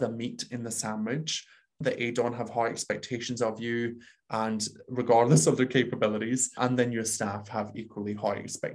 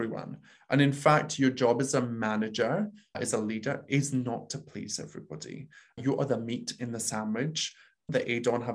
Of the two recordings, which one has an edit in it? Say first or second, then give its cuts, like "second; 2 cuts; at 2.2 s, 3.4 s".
second; 1 cut; at 3.2 s